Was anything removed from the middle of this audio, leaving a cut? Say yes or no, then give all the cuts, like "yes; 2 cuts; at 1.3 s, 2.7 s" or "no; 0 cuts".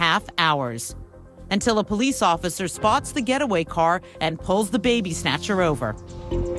yes; 1 cut; at 2.6 s